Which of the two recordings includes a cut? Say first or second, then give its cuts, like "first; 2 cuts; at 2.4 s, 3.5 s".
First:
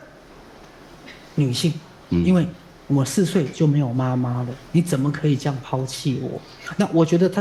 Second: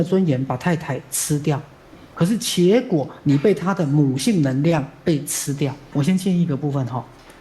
second; 1 cut; at 5.9 s